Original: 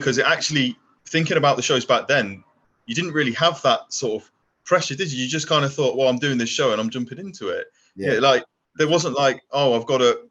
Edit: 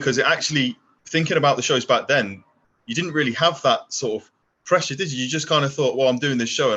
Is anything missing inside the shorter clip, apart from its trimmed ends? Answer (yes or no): no